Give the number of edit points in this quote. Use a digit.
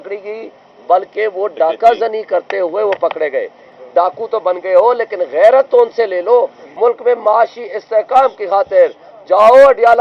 2